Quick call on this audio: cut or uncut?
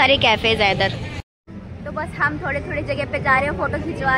uncut